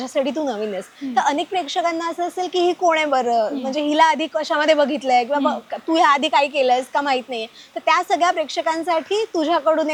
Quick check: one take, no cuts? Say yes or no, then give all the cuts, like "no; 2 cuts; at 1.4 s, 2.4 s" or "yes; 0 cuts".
yes; 0 cuts